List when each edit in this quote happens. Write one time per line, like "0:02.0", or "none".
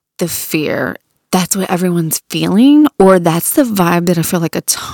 0:00.9

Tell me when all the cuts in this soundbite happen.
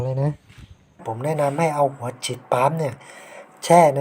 0:01.1

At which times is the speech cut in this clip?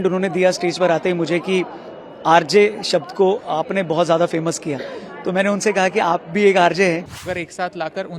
0:07.1

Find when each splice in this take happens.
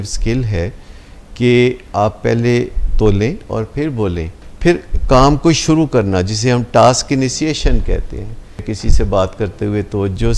0:04.5
0:08.7

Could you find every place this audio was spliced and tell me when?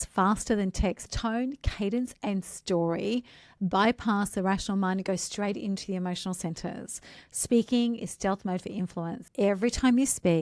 0:01.0
0:09.2

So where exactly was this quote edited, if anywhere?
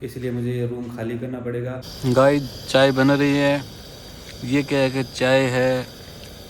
0:01.8

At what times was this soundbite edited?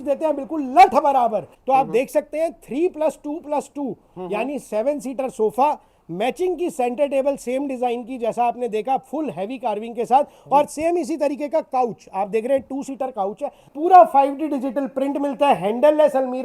0:01.5
0:13.6

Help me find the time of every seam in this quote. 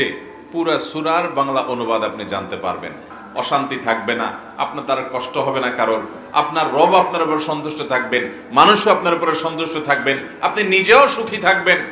0:03.2

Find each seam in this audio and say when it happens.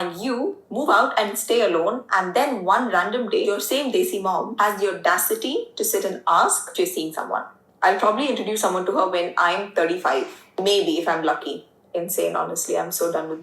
0:04.8

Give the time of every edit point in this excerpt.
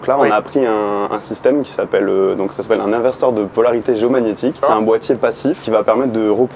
0:03.5
0:04.6
0:05.6

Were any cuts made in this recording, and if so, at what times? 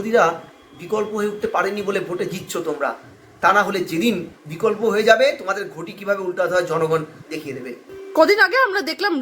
none

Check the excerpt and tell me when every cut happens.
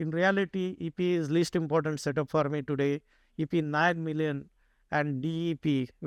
none

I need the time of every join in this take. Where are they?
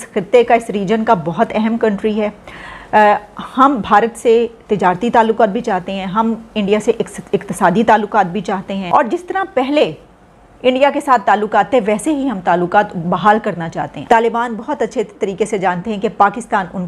0:08.8
0:13.9

